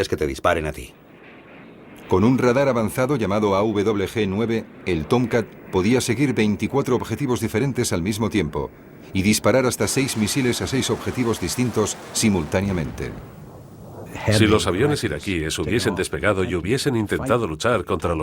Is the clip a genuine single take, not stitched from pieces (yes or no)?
no